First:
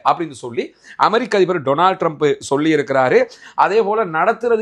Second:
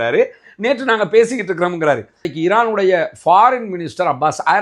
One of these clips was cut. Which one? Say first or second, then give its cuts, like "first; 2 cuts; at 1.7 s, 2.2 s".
second; 1 cut; at 2.3 s